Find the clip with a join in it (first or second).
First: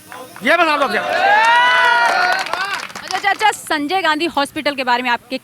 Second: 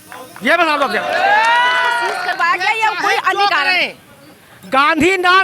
second